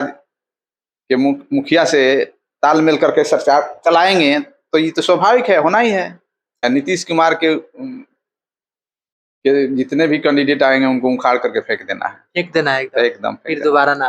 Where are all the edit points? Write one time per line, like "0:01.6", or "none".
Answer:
0:06.6

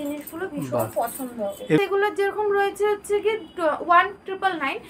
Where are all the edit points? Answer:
0:01.8

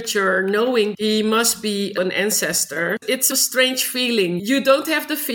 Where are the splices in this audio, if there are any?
0:00.9
0:02.0
0:03.2
0:04.4

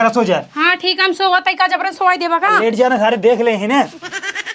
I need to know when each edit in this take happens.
none

